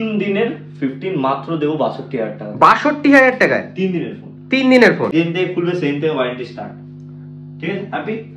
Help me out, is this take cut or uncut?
cut